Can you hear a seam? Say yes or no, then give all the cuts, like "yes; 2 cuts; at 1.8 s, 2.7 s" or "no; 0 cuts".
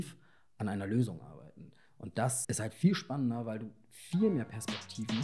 yes; 1 cut; at 2.4 s